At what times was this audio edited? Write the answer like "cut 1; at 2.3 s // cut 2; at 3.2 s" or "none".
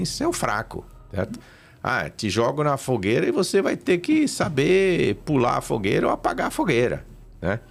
none